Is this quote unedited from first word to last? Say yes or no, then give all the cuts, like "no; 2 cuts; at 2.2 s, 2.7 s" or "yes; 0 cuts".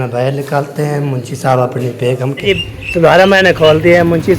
no; 1 cut; at 2.4 s